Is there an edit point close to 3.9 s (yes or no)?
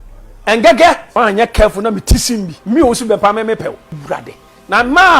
yes